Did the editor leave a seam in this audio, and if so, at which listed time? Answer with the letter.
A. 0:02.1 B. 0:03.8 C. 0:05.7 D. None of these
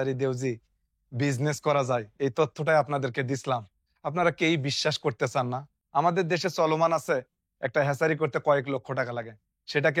C